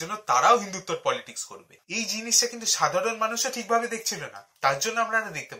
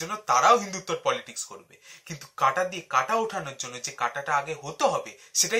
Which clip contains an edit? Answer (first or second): first